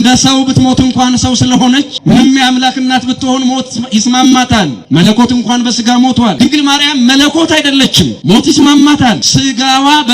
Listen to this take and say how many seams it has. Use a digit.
5